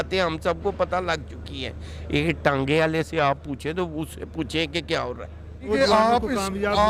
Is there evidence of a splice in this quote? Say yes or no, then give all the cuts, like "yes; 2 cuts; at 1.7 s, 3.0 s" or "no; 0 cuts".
yes; 1 cut; at 5.7 s